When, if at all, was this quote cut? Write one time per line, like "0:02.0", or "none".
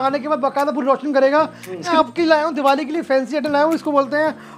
0:01.9